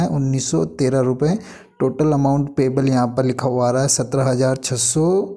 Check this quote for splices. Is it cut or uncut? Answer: uncut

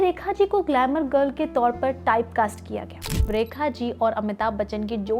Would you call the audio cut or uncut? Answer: cut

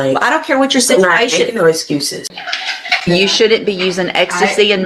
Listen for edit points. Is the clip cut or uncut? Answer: cut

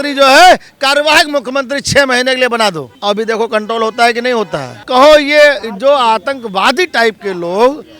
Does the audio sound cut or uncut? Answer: cut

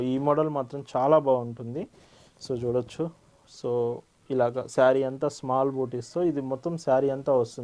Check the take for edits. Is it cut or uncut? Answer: uncut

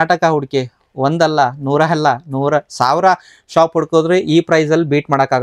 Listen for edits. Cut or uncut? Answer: uncut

